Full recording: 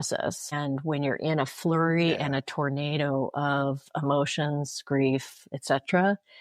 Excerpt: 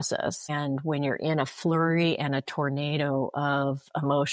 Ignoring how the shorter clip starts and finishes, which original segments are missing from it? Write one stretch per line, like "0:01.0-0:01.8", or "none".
none